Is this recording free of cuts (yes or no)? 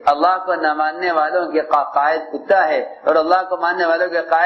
yes